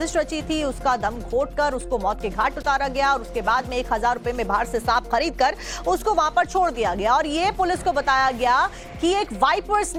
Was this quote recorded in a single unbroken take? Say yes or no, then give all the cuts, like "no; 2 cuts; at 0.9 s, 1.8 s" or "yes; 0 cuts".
yes; 0 cuts